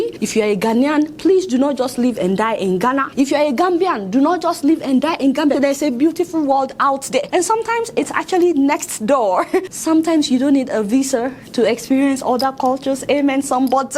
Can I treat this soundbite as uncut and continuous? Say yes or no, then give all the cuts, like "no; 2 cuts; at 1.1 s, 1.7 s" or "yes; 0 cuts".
no; 2 cuts; at 5.5 s, 9.7 s